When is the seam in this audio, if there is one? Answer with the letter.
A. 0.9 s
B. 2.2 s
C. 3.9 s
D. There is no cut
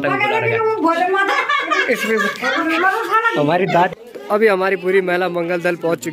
C